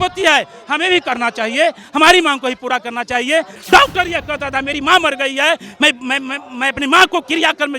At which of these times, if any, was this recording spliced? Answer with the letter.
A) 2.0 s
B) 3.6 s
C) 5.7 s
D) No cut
B